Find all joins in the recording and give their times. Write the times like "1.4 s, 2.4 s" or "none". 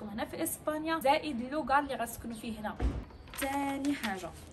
1.0 s, 3.0 s